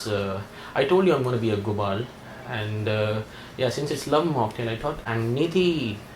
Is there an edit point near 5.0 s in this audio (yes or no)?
yes